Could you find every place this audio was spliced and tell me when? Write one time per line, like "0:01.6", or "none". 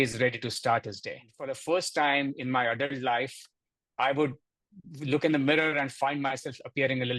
0:01.6